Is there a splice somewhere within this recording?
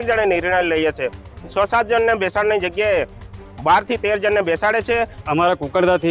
yes; 2 cuts; at 1.4 s, 5.2 s

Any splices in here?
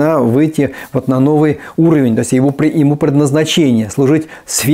no; 0 cuts

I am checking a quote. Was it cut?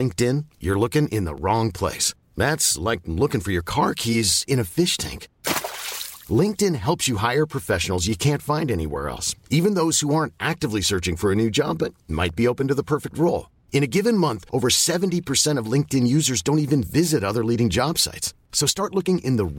no; 0 cuts

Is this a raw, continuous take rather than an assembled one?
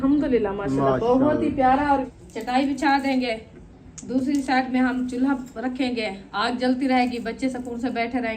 no; 1 cut; at 2.1 s

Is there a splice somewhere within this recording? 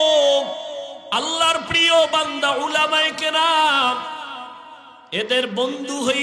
yes; 1 cut; at 0.9 s

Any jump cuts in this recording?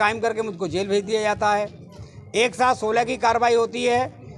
no; 0 cuts

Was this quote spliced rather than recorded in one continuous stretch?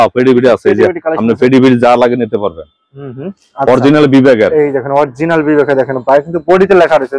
no; 0 cuts

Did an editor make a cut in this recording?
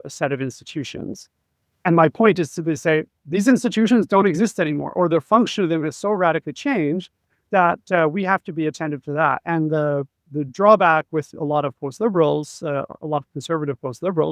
no; 0 cuts

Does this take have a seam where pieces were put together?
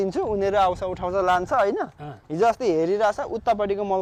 no; 0 cuts

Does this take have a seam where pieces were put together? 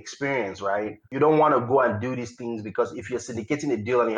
no; 0 cuts

